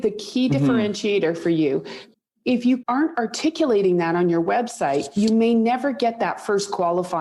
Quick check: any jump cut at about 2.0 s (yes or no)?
yes